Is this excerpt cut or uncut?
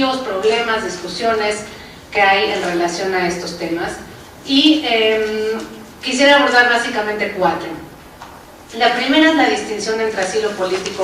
cut